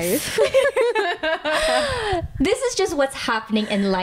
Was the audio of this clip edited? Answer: no; 0 cuts

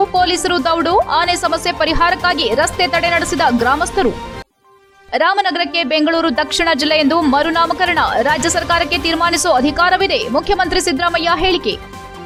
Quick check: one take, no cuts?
yes; 0 cuts

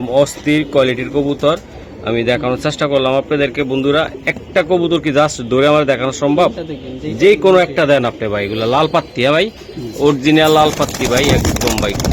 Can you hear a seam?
no; 0 cuts

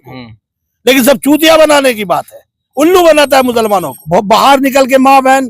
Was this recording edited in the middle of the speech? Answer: yes; 1 cut; at 4.0 s

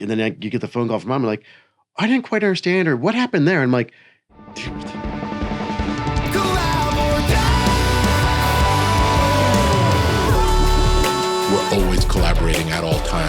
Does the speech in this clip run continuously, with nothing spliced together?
no; 1 cut; at 5.0 s

